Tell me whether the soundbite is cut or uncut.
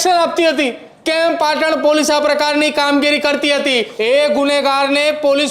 cut